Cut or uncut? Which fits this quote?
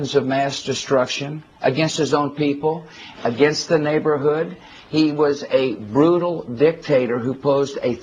cut